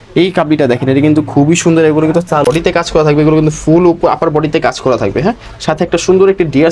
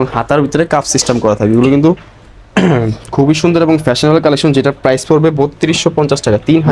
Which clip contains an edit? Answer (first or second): first